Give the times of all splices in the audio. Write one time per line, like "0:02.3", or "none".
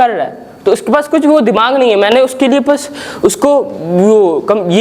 none

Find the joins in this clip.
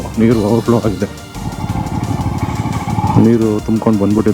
0:01.4

